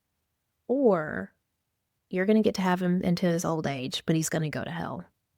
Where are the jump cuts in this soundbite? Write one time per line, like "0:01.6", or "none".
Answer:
none

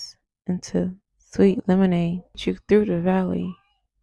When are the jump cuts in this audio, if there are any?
0:02.4

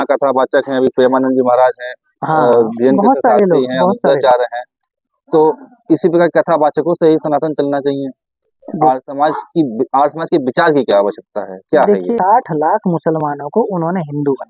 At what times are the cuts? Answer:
0:12.1

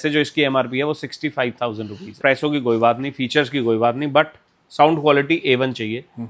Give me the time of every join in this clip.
0:02.2

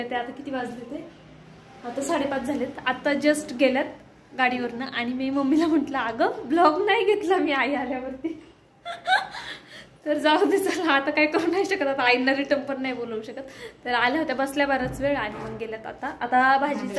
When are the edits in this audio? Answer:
none

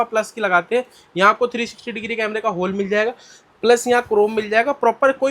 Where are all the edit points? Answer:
none

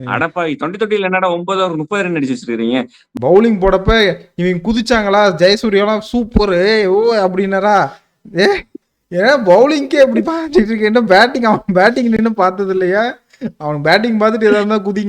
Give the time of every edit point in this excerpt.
0:03.0

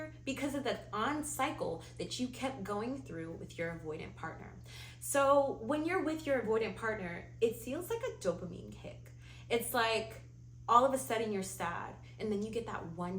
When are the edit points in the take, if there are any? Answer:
none

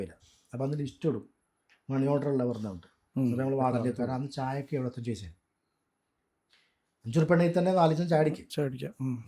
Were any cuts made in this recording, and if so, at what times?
0:04.0

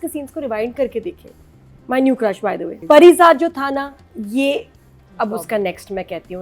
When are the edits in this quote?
0:02.7

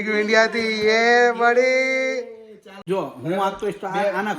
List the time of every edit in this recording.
0:02.8

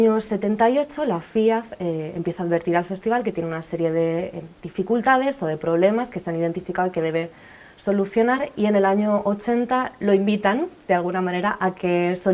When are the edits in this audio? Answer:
none

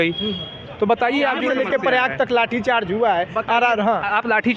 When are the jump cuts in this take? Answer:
0:01.5

